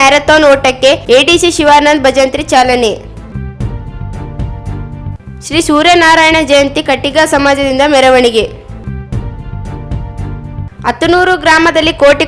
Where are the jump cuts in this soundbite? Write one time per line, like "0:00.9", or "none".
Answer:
0:03.3
0:05.2
0:08.7
0:10.5